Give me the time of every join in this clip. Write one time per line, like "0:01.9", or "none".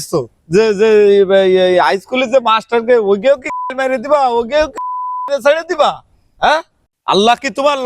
0:06.9